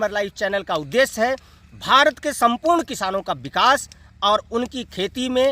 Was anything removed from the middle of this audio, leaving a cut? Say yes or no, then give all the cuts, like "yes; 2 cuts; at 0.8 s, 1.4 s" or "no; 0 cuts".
no; 0 cuts